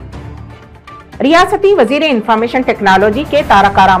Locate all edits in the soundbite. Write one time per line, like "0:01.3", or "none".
none